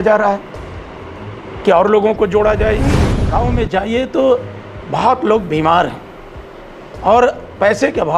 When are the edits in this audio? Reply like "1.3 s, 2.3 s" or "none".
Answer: 3.2 s